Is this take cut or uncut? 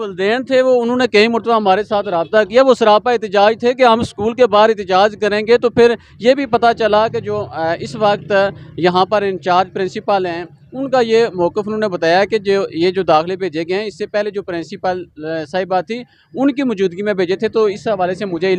uncut